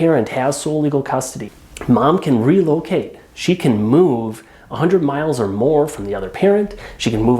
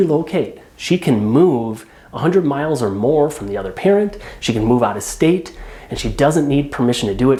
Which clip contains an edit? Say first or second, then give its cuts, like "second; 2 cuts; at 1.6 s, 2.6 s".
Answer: first; 1 cut; at 1.4 s